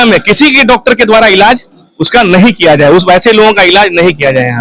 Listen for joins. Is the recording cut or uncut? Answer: uncut